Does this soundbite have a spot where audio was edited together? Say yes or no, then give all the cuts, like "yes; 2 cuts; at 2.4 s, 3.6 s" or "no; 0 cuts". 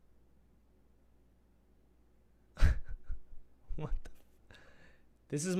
no; 0 cuts